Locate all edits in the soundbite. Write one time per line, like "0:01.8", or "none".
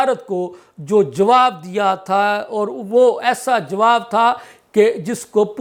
none